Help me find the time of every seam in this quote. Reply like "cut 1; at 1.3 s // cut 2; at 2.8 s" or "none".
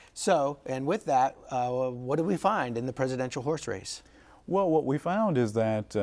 cut 1; at 2.9 s